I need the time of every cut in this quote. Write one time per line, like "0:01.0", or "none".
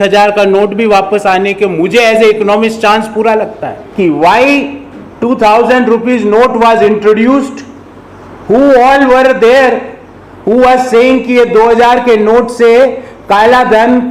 0:03.8